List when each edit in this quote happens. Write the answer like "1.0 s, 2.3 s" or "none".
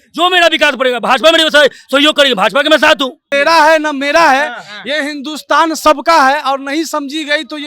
3.2 s